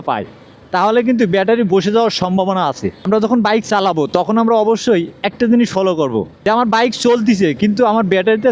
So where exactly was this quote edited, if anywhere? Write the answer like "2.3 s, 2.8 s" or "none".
3.0 s, 6.3 s

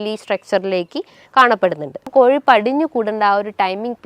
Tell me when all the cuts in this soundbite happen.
2.1 s

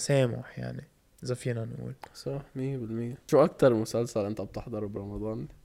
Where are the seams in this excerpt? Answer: 3.2 s

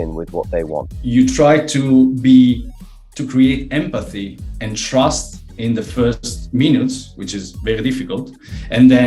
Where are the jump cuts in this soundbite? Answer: 0.9 s

